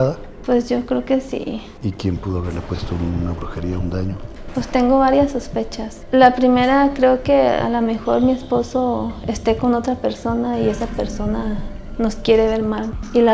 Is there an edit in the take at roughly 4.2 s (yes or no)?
yes